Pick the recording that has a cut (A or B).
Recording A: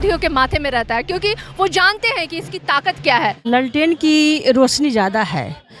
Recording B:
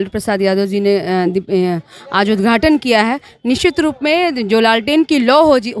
A